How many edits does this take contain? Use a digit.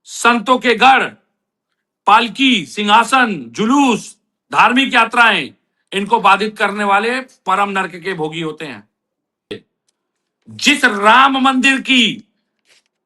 1